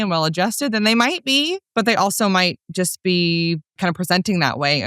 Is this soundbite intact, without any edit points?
no; 2 cuts; at 1.6 s, 3.8 s

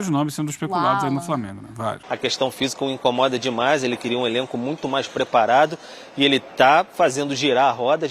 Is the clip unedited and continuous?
no; 1 cut; at 2.1 s

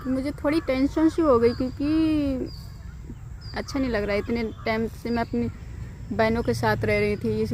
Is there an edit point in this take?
no; 0 cuts

